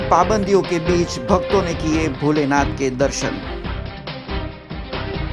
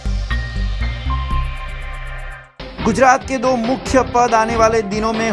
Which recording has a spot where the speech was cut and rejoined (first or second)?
second